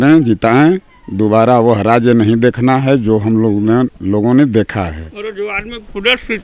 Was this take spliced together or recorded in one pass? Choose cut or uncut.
cut